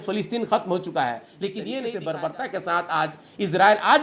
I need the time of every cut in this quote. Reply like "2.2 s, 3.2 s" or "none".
1.9 s